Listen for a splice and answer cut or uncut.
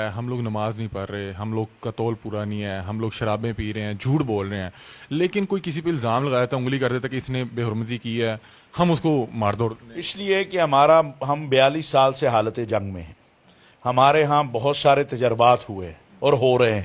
uncut